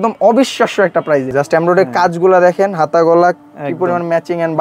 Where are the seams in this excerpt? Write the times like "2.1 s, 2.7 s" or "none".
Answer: 1.3 s